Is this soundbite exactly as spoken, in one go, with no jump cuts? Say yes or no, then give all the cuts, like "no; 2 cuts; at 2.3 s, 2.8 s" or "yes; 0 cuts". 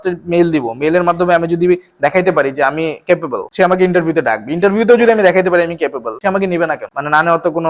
yes; 0 cuts